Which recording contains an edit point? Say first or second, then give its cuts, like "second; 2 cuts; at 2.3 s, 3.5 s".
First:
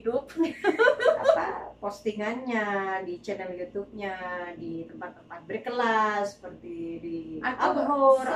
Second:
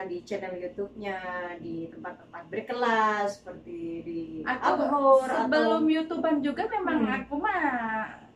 first; 1 cut; at 1.4 s